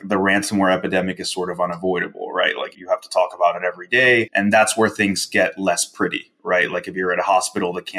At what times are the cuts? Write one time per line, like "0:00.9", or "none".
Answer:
0:02.7
0:04.3